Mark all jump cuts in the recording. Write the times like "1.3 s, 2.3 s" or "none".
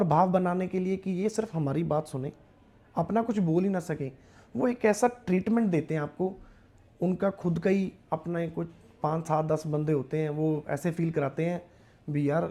none

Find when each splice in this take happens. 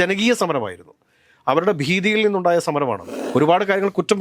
3.1 s

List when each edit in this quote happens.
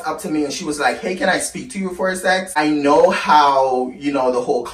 2.6 s

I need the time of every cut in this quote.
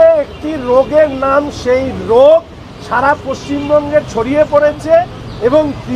none

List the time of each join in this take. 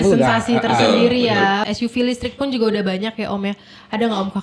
1.6 s

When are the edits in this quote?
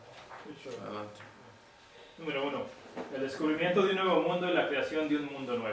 none

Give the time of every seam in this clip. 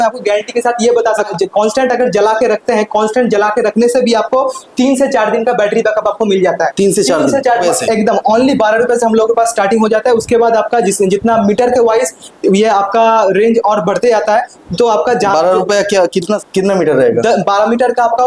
1.3 s, 7.6 s, 16.5 s

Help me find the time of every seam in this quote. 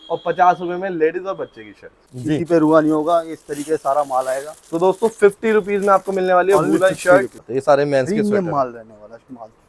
2.0 s, 7.4 s

